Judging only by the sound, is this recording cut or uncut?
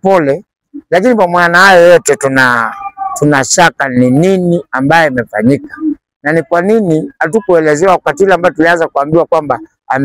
uncut